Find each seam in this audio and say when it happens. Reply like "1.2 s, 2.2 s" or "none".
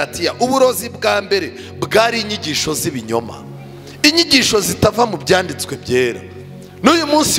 none